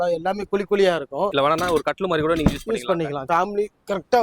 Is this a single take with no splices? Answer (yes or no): no